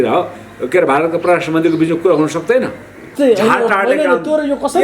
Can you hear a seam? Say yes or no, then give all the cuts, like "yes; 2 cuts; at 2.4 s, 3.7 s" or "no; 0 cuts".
yes; 1 cut; at 3.1 s